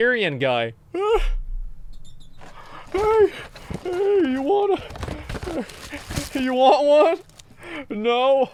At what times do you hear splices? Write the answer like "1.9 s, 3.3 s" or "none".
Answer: none